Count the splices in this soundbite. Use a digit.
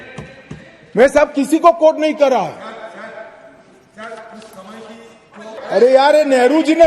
1